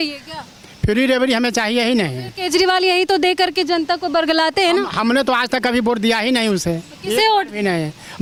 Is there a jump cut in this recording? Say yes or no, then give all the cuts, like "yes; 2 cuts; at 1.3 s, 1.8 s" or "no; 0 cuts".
no; 0 cuts